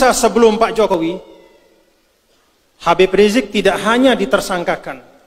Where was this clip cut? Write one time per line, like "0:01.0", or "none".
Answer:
0:00.9